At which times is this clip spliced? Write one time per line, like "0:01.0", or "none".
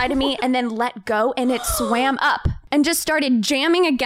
0:02.5